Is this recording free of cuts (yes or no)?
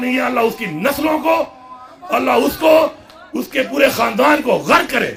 yes